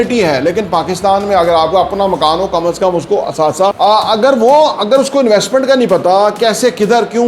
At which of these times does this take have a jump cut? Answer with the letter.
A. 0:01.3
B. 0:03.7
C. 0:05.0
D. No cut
B